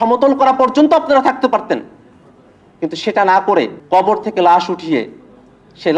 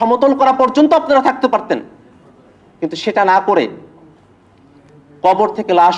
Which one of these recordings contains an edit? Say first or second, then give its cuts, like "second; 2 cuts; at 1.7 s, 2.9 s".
first; 1 cut; at 3.8 s